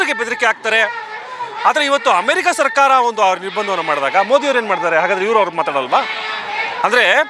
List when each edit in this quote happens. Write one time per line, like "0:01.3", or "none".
none